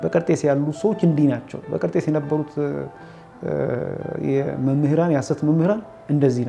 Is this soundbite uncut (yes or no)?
yes